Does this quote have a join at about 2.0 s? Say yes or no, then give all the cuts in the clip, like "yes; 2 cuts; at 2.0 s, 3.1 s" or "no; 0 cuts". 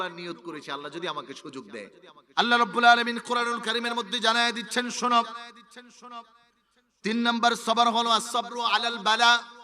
yes; 1 cut; at 2.0 s